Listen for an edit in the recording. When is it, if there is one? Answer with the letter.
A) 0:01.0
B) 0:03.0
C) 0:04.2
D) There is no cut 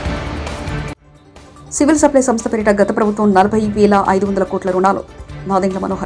A